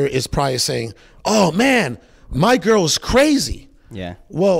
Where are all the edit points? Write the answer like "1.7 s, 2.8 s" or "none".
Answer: none